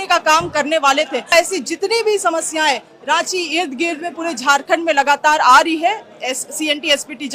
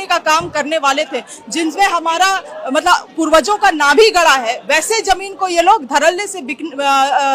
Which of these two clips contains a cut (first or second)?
first